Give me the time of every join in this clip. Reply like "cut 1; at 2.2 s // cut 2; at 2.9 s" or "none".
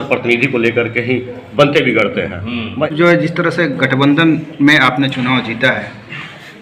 cut 1; at 2.9 s